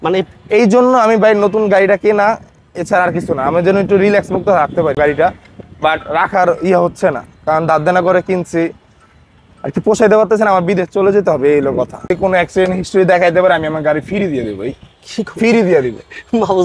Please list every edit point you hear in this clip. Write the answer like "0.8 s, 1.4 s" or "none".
5.0 s, 12.1 s